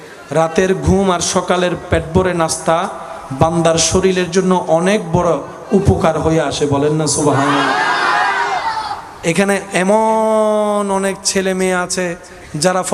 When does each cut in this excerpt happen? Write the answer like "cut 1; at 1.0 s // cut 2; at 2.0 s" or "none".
none